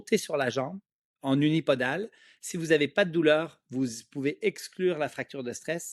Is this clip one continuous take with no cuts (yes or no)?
yes